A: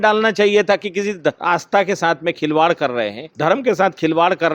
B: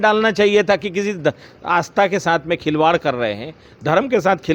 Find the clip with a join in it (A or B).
A